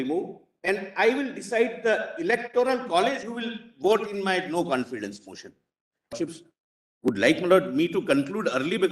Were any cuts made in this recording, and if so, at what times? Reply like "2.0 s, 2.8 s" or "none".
6.1 s